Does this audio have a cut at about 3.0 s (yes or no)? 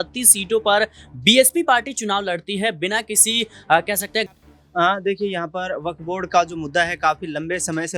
no